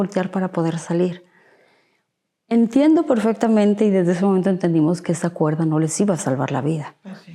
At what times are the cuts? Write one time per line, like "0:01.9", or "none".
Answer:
none